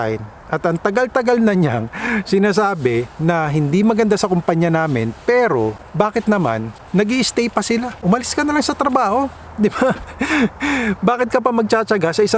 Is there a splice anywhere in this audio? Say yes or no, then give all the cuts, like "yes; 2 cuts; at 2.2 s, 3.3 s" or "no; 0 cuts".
yes; 3 cuts; at 5.8 s, 6.7 s, 8.0 s